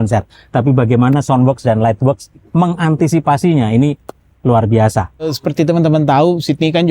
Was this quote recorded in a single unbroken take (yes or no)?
no